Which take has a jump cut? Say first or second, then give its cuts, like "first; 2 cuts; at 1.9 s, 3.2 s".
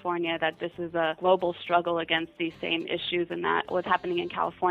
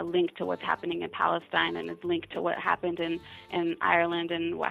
first; 2 cuts; at 1.2 s, 3.7 s